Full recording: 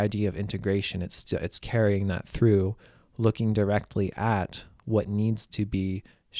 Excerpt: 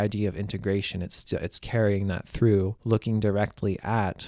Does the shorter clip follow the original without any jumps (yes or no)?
no